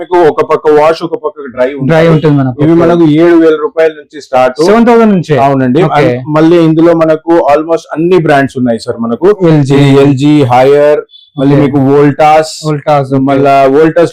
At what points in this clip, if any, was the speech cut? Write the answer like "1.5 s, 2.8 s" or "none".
none